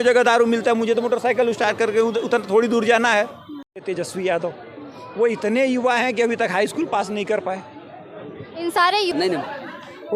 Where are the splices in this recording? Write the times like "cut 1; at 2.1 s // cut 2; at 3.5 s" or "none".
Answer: cut 1; at 3.8 s // cut 2; at 9.1 s